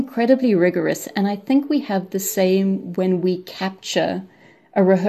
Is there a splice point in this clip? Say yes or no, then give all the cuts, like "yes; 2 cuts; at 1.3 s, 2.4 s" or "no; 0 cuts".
no; 0 cuts